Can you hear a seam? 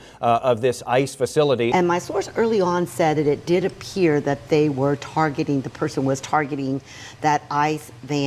yes; 1 cut; at 1.7 s

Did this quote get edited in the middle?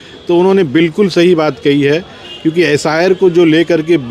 no; 0 cuts

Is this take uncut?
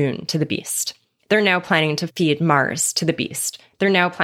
no; 1 cut; at 2.1 s

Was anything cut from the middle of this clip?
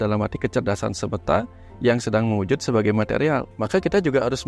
yes; 1 cut; at 3.5 s

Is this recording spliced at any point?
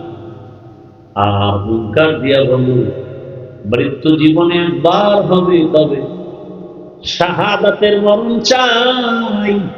no; 0 cuts

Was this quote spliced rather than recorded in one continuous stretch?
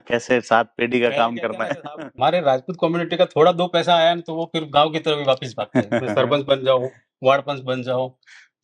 yes; 1 cut; at 2.2 s

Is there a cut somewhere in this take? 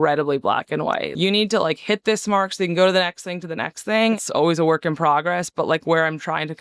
yes; 2 cuts; at 1.1 s, 4.2 s

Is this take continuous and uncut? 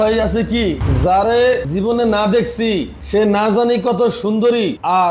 no; 3 cuts; at 0.8 s, 1.7 s, 2.9 s

